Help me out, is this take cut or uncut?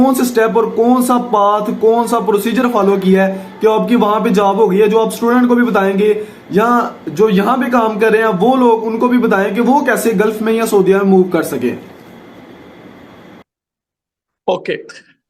uncut